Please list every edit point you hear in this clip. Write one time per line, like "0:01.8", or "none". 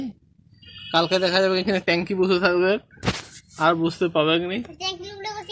none

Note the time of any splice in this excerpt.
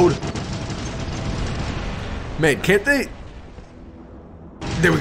none

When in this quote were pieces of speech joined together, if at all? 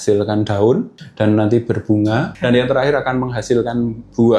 0:00.9
0:02.3

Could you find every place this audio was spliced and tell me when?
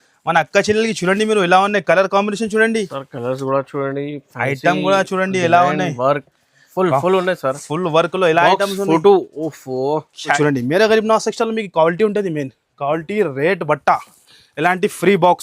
0:10.4

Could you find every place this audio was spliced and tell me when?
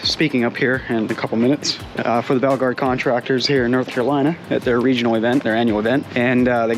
0:01.8
0:04.4

